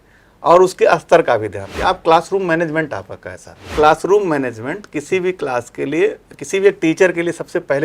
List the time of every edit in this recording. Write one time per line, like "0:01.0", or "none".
0:01.6
0:03.7